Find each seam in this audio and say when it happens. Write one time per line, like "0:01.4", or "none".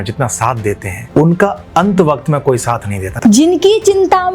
0:00.9
0:03.0